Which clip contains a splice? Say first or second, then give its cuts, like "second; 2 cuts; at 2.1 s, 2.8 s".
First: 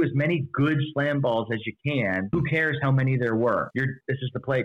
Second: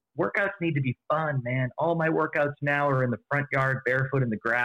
first; 2 cuts; at 2.3 s, 3.7 s